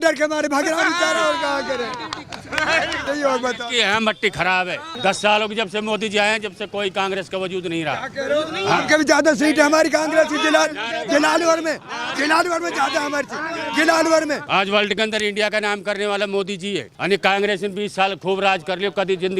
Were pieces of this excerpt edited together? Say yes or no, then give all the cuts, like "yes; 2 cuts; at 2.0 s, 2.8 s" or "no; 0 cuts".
yes; 4 cuts; at 3.0 s, 4.9 s, 14.4 s, 16.9 s